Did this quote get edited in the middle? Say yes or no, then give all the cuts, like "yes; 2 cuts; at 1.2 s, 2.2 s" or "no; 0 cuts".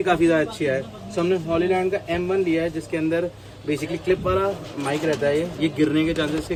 no; 0 cuts